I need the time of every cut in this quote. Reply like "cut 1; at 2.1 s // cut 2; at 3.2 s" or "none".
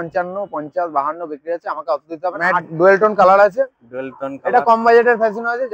cut 1; at 2.7 s